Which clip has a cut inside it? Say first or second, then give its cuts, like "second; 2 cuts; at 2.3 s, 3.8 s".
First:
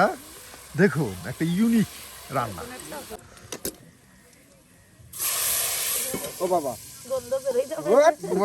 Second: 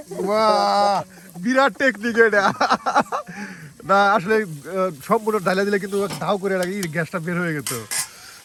first; 1 cut; at 3.2 s